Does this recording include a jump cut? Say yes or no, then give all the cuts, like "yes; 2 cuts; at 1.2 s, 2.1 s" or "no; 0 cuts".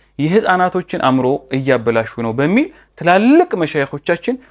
no; 0 cuts